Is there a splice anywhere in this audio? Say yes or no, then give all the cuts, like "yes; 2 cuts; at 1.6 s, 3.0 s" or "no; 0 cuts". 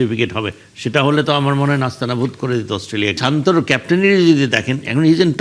yes; 1 cut; at 3.2 s